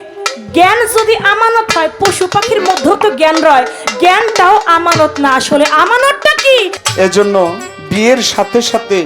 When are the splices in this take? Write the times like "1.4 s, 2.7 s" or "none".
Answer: 6.7 s